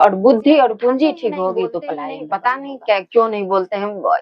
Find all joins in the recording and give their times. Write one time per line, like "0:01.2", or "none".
0:02.1

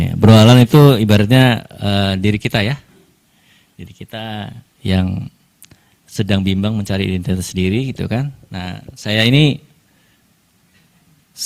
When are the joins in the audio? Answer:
none

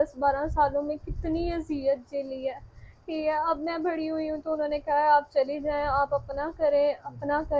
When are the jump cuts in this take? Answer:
none

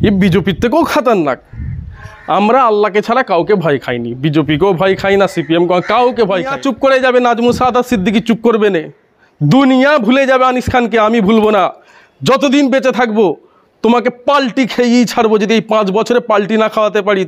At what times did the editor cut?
0:06.6

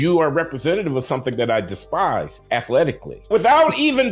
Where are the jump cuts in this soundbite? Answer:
0:02.3
0:03.3

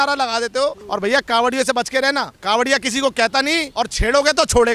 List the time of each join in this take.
0:00.8
0:02.3
0:03.7

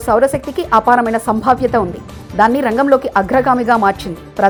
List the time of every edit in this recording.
none

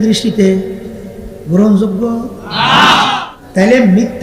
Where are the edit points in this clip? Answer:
0:03.2

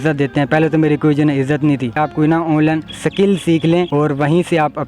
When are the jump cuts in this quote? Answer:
0:02.0
0:02.9
0:03.9

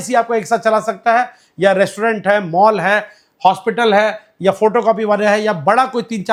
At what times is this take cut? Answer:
none

